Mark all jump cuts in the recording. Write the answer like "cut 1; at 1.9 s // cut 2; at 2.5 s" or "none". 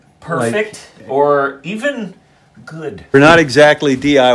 cut 1; at 3.1 s